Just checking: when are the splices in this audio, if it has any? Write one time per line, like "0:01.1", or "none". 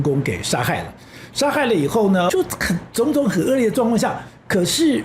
0:02.3